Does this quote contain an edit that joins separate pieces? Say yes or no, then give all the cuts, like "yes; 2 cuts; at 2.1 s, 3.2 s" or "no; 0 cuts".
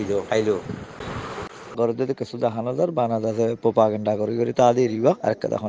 yes; 1 cut; at 1.7 s